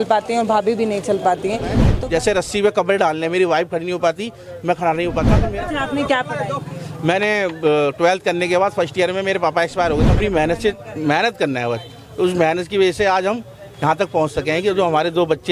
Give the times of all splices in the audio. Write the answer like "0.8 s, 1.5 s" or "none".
1.9 s, 5.4 s, 10.1 s